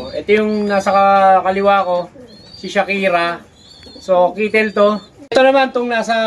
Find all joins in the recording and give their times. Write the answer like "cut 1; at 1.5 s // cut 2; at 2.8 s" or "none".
cut 1; at 5.1 s